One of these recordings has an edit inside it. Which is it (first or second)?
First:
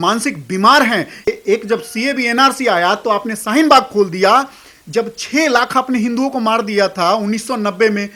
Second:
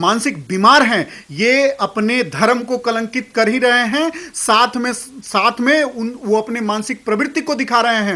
first